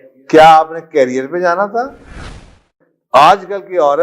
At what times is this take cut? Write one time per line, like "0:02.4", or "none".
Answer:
0:02.6